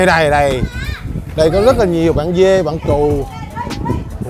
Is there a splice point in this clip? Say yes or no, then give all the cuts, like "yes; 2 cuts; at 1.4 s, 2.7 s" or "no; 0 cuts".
no; 0 cuts